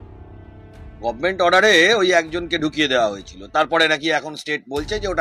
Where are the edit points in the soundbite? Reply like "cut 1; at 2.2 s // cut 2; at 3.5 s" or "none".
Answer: none